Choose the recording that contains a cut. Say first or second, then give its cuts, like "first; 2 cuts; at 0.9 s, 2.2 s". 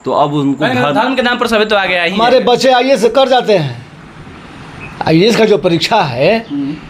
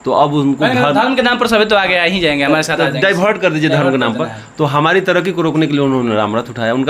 first; 1 cut; at 2.2 s